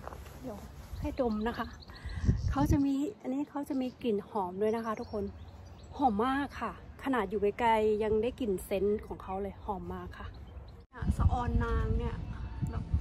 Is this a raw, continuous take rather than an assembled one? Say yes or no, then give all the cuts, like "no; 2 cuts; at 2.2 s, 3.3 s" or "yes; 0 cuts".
no; 1 cut; at 10.8 s